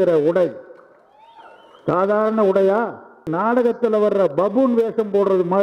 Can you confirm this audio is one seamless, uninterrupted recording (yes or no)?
no